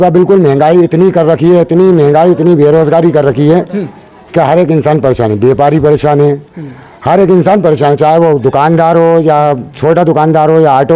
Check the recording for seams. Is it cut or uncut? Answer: uncut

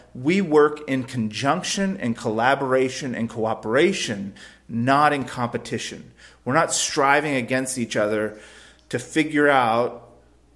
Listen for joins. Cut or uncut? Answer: uncut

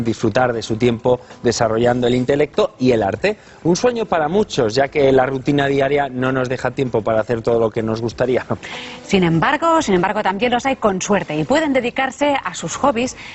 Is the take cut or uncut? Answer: cut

